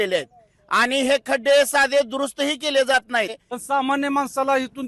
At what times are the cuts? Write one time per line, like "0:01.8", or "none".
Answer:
0:03.4

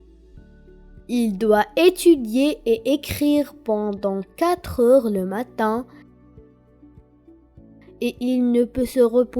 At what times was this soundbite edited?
0:01.0
0:06.0
0:07.6

